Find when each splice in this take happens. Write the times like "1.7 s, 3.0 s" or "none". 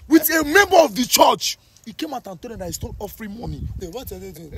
3.7 s